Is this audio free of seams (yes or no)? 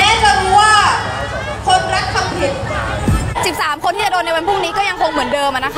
no